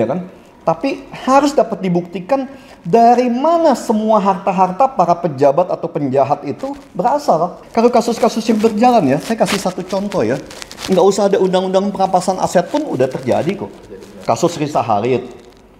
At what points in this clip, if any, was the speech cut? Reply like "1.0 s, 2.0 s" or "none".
7.6 s